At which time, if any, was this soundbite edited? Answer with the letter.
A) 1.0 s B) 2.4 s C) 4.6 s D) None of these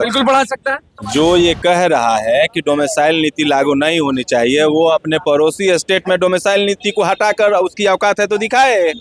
A